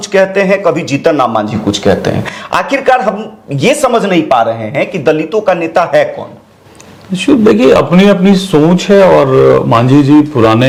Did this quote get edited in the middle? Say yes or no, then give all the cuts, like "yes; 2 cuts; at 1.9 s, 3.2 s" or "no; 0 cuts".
no; 0 cuts